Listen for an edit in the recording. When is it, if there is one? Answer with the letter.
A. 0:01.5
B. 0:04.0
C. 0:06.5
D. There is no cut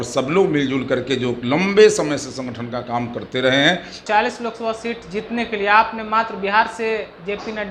B